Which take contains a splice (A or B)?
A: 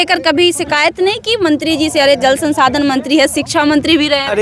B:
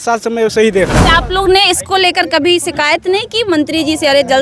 B